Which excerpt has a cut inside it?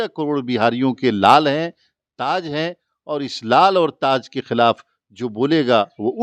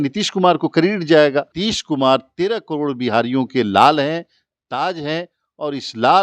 second; 1 cut; at 1.6 s

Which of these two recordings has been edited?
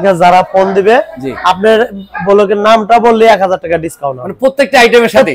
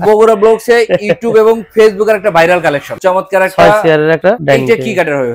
second; 2 cuts; at 2.9 s, 4.2 s

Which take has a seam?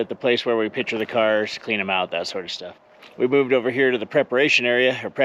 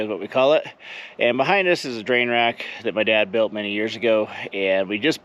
first; 1 cut; at 3.1 s

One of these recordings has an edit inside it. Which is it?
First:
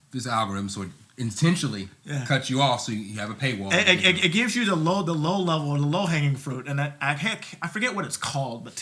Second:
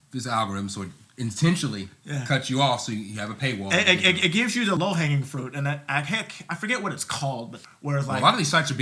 second; 2 cuts; at 4.8 s, 7.5 s

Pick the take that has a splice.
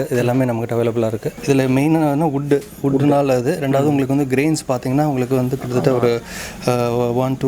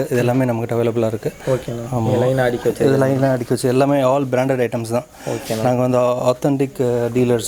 first; 1 cut; at 1.3 s

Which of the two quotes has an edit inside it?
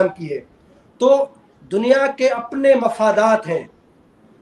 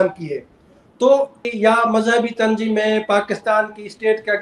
second; 1 cut; at 1.4 s

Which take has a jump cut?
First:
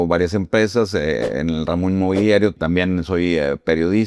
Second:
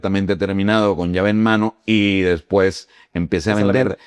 first; 1 cut; at 2.6 s

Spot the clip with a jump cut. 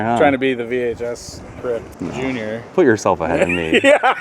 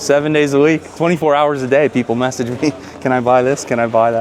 first; 1 cut; at 1.9 s

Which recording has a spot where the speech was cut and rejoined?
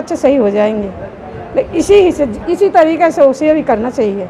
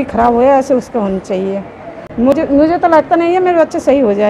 second; 1 cut; at 2.3 s

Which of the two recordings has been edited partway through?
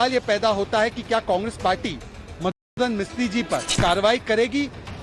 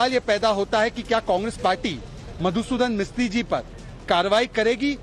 first; 1 cut; at 3.7 s

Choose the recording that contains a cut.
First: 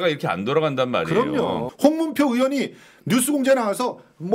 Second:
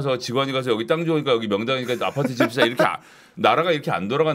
first; 1 cut; at 1.7 s

